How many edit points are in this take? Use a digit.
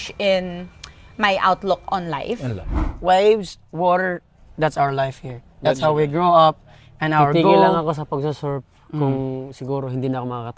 1